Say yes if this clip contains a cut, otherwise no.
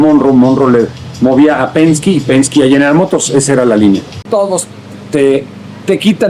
yes